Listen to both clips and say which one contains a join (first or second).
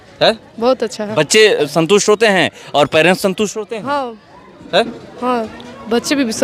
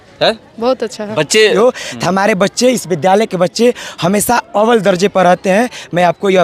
second